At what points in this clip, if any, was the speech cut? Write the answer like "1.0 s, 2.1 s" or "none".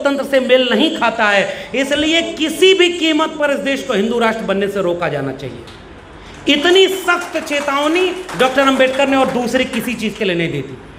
none

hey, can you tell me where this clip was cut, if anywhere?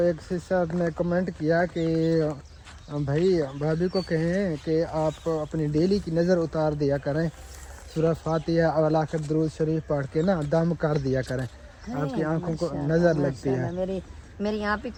none

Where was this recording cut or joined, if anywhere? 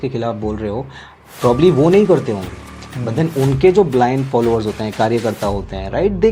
none

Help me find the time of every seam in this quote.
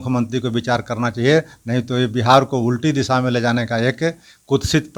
none

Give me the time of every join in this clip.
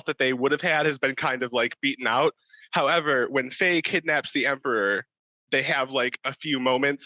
none

